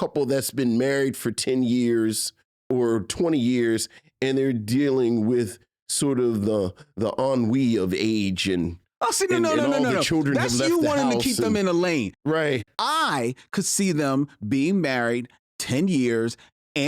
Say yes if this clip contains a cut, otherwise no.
yes